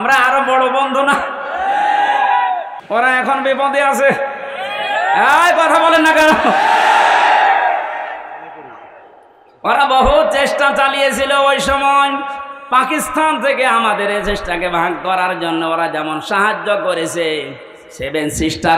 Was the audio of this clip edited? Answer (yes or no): yes